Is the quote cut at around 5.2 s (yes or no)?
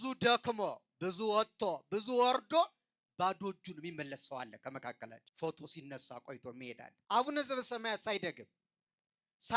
yes